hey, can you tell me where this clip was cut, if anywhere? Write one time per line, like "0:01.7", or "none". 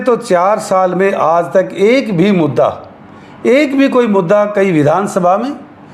none